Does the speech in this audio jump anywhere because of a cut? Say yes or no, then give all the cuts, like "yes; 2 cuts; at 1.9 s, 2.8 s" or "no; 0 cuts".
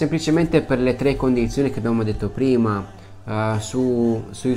no; 0 cuts